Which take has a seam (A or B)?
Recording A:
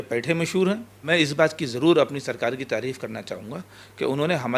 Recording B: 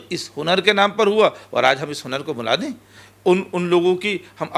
A